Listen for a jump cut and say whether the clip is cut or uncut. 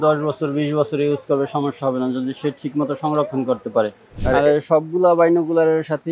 cut